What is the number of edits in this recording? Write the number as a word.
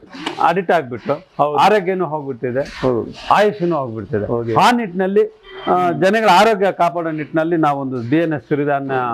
zero